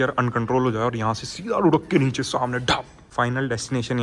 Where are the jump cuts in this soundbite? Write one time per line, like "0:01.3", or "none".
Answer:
0:03.0